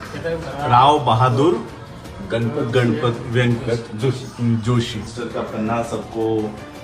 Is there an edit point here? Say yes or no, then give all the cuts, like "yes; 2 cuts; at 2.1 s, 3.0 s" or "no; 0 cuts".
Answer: yes; 1 cut; at 5.1 s